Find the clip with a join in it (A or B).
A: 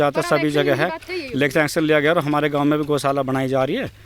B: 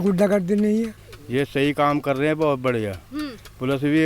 B